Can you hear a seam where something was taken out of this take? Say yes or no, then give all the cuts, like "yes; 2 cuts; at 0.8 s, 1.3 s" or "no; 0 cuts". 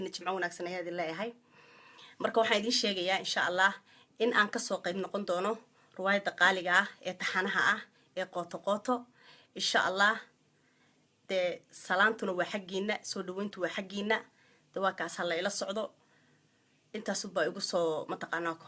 no; 0 cuts